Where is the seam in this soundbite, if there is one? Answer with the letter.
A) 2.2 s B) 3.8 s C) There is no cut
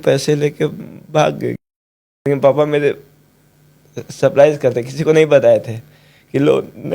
A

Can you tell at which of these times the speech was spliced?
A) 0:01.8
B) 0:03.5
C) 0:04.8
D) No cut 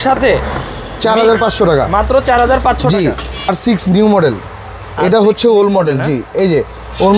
B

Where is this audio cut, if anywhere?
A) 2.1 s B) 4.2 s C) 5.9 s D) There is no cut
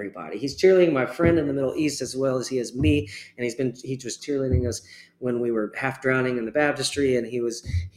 B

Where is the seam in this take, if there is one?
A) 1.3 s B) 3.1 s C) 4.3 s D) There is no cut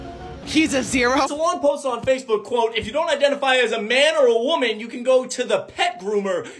A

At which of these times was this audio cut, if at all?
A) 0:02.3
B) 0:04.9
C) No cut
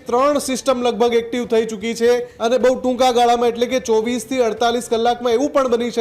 A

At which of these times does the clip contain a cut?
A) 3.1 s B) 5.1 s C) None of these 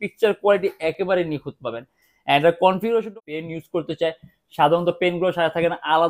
A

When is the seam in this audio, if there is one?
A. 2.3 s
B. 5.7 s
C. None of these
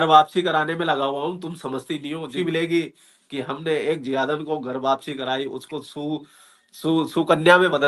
A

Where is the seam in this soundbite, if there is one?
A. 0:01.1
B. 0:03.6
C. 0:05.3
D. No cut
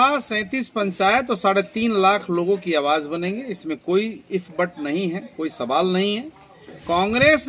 D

